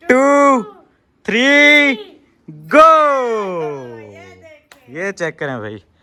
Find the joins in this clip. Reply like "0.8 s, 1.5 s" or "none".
none